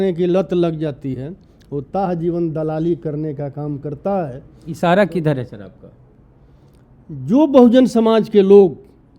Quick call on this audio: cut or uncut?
uncut